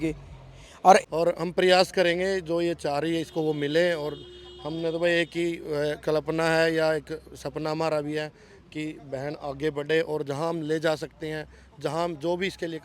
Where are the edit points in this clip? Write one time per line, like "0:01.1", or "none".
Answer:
0:01.0